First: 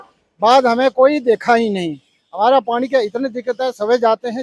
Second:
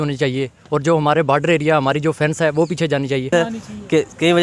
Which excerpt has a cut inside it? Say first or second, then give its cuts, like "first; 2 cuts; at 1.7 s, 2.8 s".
second; 1 cut; at 3.3 s